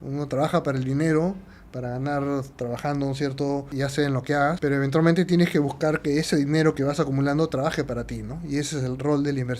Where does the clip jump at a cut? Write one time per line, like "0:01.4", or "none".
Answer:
0:03.7
0:04.6